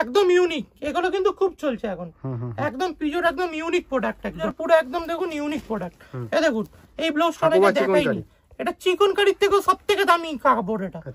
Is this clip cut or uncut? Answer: uncut